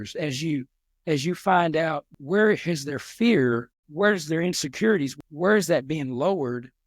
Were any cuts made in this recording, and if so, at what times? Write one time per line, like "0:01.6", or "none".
0:02.1
0:03.8
0:05.1